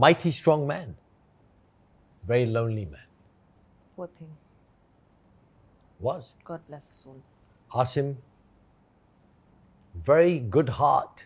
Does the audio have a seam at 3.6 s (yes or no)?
no